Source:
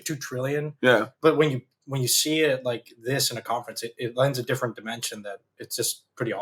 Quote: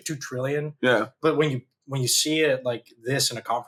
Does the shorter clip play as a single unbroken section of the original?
yes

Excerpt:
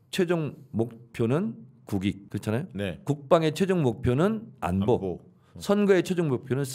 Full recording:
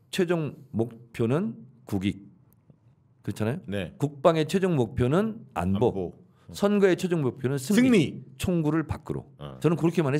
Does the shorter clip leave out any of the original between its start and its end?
yes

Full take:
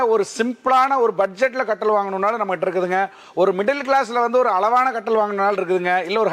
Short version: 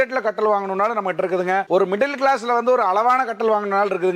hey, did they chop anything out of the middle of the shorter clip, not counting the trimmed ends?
yes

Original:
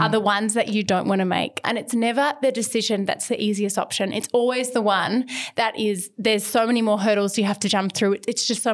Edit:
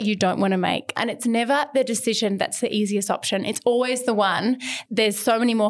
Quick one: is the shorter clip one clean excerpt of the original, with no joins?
no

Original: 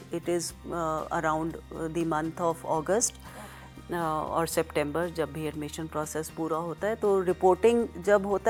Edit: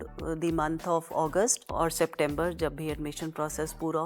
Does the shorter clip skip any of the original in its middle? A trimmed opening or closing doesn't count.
yes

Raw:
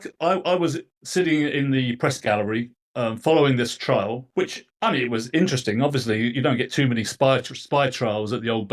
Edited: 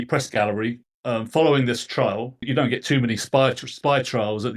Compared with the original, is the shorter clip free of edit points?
no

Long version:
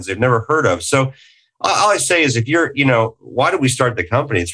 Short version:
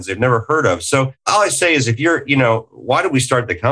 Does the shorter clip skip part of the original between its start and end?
yes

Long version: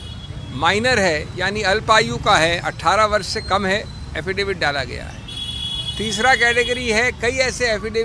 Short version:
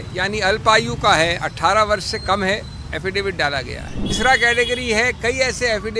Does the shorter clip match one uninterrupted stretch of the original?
no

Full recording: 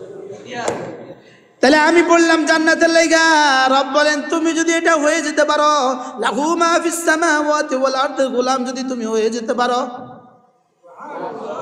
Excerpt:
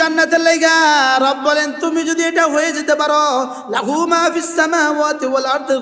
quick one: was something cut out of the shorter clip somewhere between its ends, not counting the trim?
no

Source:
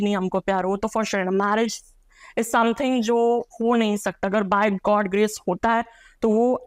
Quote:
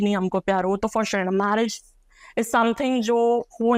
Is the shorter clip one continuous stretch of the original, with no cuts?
yes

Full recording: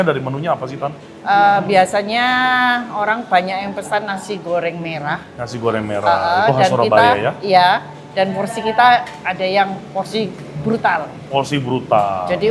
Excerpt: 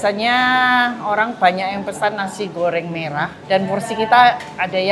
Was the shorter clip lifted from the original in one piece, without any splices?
no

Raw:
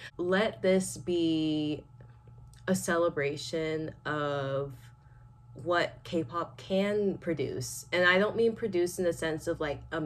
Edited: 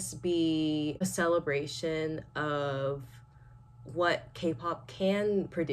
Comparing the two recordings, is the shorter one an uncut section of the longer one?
no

